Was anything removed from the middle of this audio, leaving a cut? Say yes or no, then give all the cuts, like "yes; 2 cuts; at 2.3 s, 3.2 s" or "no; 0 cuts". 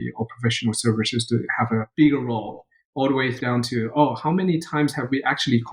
yes; 2 cuts; at 1.9 s, 3.4 s